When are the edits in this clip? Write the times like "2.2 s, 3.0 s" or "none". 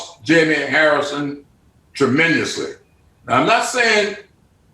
2.9 s